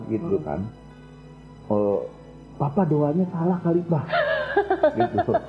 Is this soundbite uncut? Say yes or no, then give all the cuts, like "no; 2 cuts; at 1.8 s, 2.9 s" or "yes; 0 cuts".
yes; 0 cuts